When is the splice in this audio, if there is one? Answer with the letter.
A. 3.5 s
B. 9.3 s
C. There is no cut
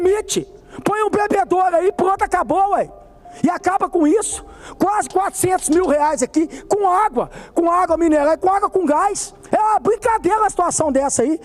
B